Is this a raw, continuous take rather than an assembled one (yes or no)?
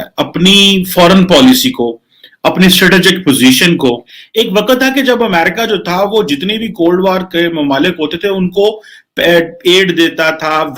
no